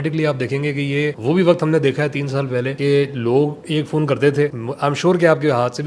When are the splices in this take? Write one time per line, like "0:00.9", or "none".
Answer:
0:01.2
0:02.7
0:04.6